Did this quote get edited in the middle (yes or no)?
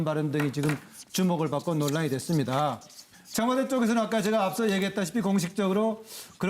yes